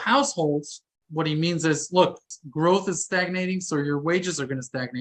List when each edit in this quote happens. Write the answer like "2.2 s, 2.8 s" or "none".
1.0 s, 2.3 s